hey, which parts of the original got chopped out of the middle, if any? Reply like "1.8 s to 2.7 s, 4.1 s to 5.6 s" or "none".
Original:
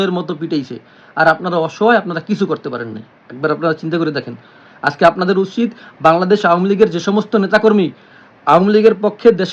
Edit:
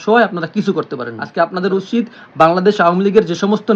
2.9 s to 4.8 s